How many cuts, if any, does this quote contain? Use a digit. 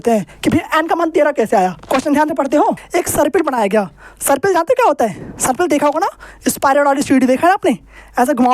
2